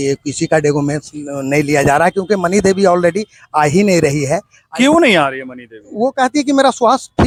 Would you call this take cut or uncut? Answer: uncut